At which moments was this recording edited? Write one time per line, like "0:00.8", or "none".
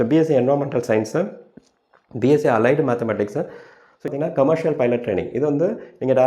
0:04.1